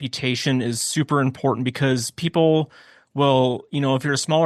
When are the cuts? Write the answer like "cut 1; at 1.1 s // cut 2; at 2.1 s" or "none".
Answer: none